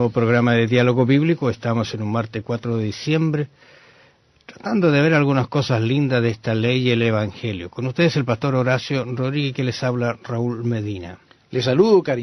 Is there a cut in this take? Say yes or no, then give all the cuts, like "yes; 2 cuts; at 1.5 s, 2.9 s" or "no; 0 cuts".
no; 0 cuts